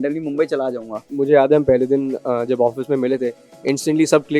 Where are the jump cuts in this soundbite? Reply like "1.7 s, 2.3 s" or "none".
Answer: 1.1 s